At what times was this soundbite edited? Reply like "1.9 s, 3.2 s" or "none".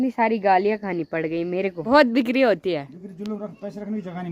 1.8 s